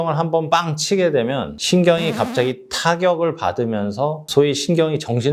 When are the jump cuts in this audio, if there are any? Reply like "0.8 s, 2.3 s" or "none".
4.2 s